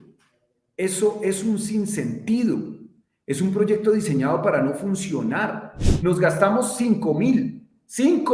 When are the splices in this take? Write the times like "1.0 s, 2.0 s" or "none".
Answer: 5.8 s